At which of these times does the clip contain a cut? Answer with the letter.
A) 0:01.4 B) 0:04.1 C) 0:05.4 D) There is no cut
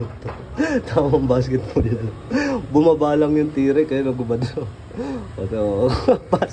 D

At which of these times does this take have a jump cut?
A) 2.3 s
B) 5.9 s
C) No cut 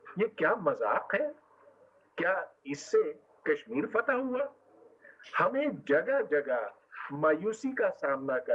C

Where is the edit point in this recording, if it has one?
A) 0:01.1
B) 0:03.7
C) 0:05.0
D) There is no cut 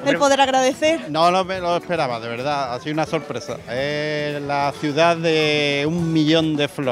A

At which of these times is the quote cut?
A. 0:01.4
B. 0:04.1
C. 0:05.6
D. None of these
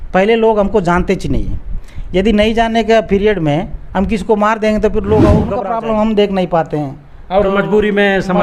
C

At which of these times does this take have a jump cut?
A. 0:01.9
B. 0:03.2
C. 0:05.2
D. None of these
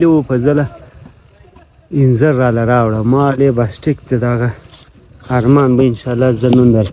D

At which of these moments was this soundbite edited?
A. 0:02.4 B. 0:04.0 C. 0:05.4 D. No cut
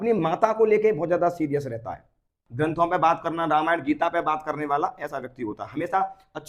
A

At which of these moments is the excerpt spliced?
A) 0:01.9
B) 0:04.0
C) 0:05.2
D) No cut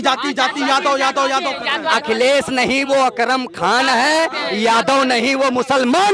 A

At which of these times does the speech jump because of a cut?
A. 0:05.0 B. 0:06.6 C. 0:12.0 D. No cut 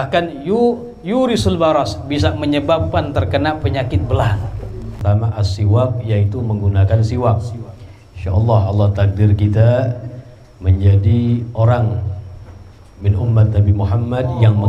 A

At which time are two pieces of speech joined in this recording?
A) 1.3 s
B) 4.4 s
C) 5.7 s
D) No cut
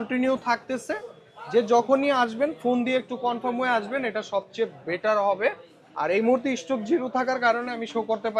D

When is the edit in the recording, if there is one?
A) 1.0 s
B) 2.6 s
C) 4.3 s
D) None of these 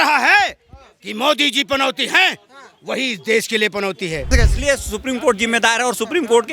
C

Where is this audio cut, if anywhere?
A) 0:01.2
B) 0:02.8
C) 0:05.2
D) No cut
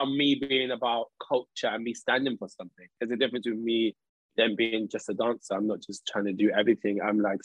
D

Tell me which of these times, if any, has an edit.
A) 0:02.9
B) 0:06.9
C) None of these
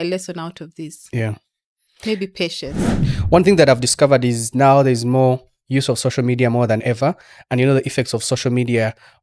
A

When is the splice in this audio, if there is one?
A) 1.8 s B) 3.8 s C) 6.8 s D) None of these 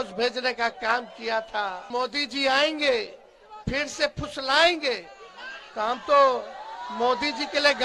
A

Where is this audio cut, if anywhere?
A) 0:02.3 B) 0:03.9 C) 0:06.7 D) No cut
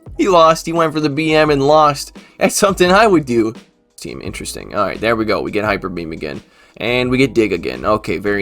B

